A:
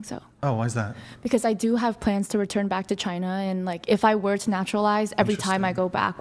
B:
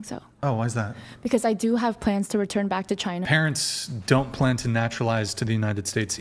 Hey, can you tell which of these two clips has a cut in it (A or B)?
B